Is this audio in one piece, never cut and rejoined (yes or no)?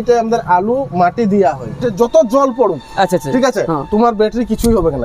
no